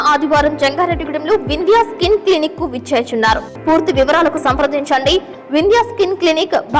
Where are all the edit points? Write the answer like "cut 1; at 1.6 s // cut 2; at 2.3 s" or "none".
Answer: cut 1; at 3.5 s

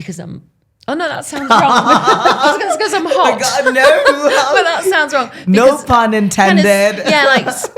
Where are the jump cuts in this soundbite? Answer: none

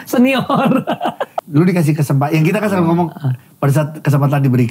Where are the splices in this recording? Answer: cut 1; at 1.3 s

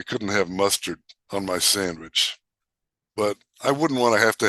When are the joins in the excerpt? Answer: cut 1; at 1.1 s

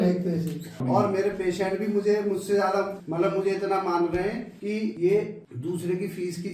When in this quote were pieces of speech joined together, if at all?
cut 1; at 0.8 s // cut 2; at 3.0 s // cut 3; at 4.8 s // cut 4; at 5.4 s

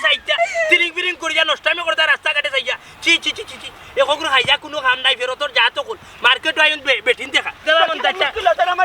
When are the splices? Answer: cut 1; at 7.6 s

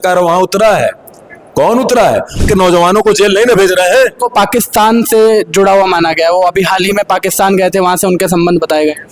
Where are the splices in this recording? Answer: cut 1; at 2.4 s

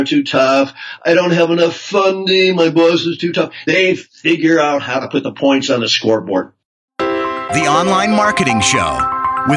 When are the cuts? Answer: cut 1; at 6.7 s

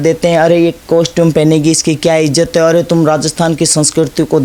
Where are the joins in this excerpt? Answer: none

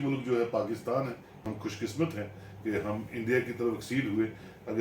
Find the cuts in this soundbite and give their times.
cut 1; at 1.4 s

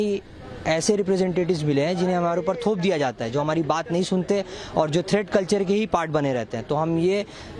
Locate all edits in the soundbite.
none

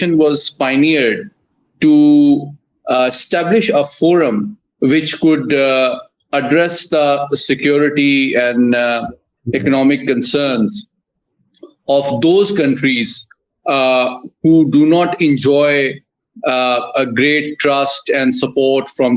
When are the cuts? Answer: none

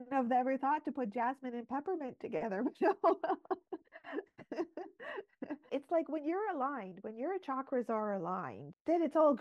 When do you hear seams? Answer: cut 1; at 5.7 s

